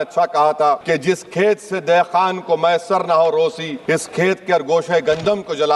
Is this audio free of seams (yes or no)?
no